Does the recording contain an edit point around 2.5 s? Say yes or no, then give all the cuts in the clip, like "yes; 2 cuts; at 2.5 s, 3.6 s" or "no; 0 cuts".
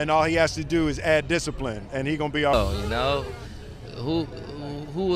yes; 1 cut; at 2.5 s